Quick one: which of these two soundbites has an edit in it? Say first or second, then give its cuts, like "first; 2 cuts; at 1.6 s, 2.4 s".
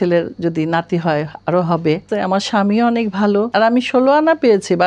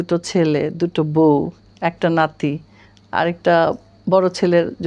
first; 2 cuts; at 2.1 s, 3.5 s